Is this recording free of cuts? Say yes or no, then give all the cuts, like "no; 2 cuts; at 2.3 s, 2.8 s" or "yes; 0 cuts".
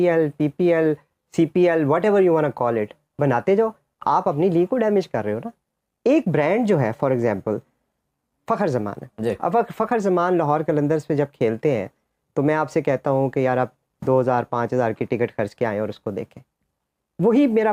yes; 0 cuts